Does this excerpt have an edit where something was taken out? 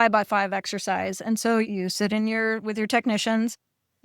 yes; 1 cut; at 1.7 s

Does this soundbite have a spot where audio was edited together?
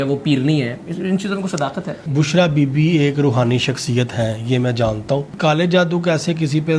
yes; 2 cuts; at 2.0 s, 5.3 s

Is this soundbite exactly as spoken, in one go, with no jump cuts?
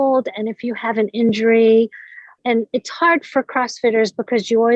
no; 1 cut; at 2.4 s

